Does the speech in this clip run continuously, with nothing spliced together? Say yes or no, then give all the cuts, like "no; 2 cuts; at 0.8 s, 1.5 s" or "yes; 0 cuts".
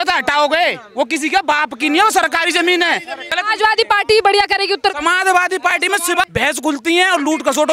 no; 2 cuts; at 3.2 s, 6.3 s